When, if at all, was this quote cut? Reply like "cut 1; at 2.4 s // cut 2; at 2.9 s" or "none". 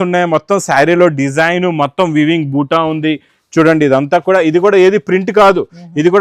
none